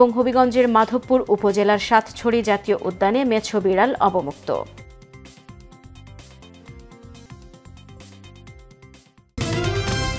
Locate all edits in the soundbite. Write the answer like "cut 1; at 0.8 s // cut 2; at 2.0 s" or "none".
cut 1; at 9.3 s